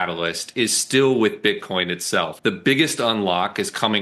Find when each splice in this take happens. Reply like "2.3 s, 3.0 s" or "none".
2.3 s